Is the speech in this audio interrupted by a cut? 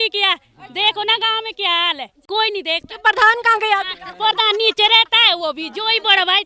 yes; 1 cut; at 2.3 s

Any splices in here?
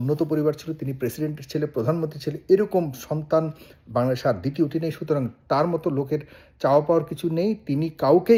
no; 0 cuts

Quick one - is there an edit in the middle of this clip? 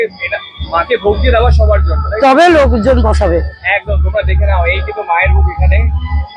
no; 0 cuts

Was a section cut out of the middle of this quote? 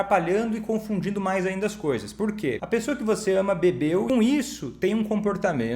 yes; 2 cuts; at 2.6 s, 4.1 s

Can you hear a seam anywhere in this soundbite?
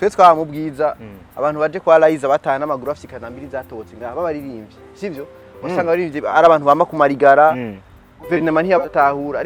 no; 0 cuts

